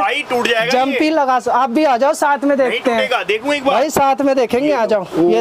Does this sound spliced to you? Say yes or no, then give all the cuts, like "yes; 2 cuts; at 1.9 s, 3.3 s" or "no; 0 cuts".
no; 0 cuts